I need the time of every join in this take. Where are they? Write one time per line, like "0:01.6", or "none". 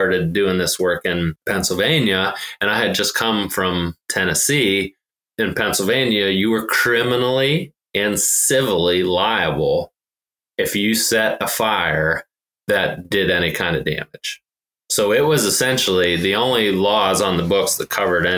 0:01.4
0:04.0
0:05.2